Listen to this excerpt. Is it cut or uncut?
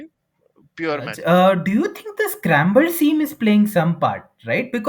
cut